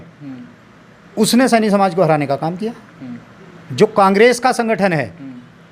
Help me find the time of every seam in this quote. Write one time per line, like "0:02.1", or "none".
none